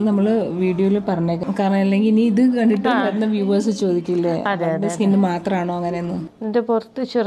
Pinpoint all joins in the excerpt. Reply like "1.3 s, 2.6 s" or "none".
1.4 s, 6.3 s